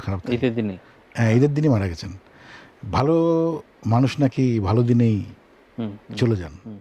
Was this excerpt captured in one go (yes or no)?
yes